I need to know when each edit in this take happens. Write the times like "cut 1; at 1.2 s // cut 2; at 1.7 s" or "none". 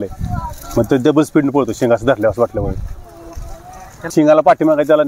cut 1; at 4.1 s